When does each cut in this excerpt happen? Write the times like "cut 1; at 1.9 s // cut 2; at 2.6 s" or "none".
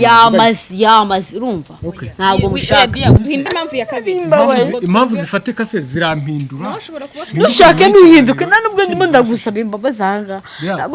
cut 1; at 3.2 s